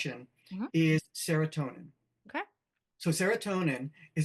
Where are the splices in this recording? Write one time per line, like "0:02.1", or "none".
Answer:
none